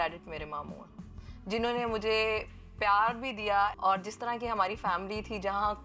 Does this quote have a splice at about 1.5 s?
no; 1 cut; at 3.7 s

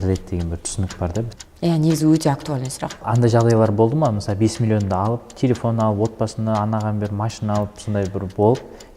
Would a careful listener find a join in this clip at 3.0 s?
yes; 2 cuts; at 1.4 s, 3.0 s

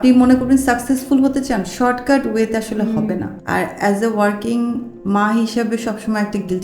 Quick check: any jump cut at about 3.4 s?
yes; 1 cut; at 3.4 s

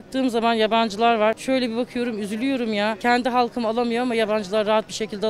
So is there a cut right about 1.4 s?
yes; 2 cuts; at 1.4 s, 3.0 s

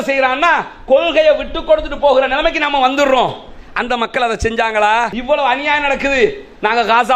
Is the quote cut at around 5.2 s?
yes; 1 cut; at 5.2 s

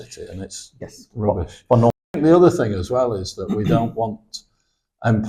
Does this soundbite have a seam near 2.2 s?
yes; 1 cut; at 2.2 s

